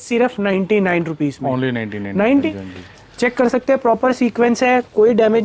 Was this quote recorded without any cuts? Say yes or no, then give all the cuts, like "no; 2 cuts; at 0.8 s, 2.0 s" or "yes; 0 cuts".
no; 1 cut; at 2.5 s